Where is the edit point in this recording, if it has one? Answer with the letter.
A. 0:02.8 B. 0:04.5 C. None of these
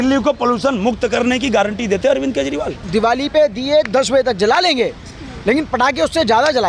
A